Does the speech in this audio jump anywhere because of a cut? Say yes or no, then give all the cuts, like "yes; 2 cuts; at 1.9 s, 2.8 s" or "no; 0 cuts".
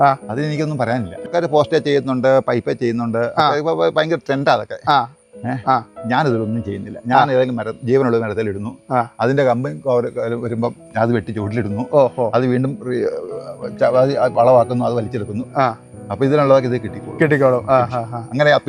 no; 0 cuts